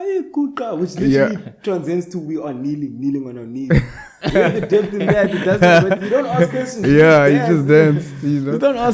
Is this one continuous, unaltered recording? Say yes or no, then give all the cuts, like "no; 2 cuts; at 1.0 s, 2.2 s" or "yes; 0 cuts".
yes; 0 cuts